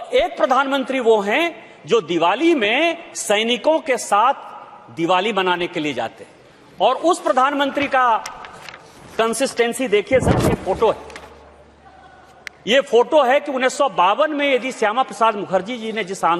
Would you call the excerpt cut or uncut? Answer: uncut